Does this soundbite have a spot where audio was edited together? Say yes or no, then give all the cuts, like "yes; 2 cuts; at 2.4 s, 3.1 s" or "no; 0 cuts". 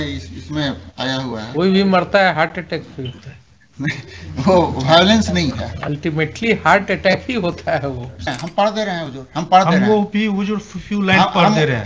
yes; 1 cut; at 8.3 s